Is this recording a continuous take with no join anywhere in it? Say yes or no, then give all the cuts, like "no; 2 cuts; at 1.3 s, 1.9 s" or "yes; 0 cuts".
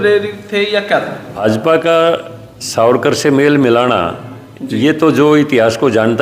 no; 1 cut; at 1.6 s